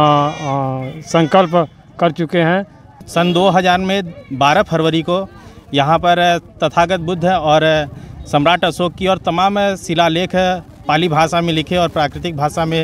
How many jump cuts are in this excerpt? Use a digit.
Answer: 1